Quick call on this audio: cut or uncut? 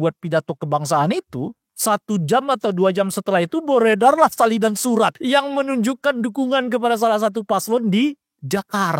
cut